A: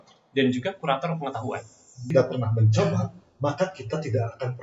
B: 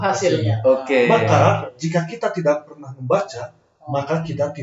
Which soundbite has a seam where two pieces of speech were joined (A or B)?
A